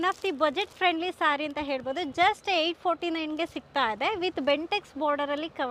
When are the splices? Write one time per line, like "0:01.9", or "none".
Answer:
none